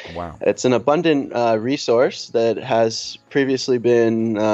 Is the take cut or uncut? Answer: uncut